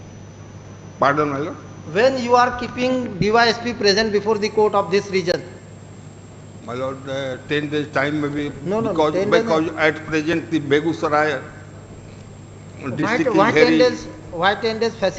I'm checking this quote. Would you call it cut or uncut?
uncut